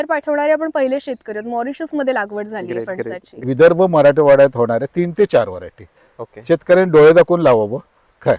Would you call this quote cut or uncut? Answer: cut